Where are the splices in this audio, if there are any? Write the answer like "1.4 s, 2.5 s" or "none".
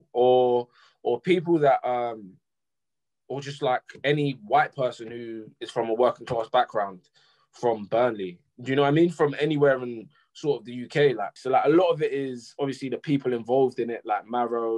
11.3 s